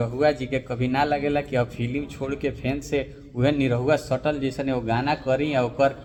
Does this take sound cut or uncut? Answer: uncut